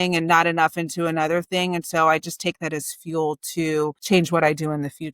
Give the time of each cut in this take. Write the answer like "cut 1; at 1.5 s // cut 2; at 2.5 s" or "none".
cut 1; at 4.0 s